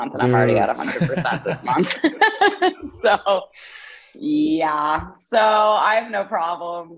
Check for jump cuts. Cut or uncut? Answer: uncut